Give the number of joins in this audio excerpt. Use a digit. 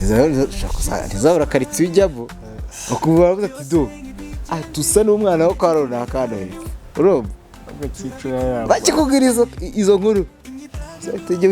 0